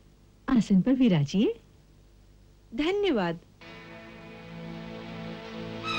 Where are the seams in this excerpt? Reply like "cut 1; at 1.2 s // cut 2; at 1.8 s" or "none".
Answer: none